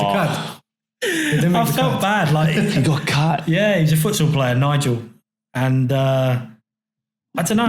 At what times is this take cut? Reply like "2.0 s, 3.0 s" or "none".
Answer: none